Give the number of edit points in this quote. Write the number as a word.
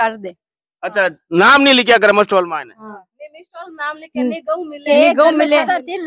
zero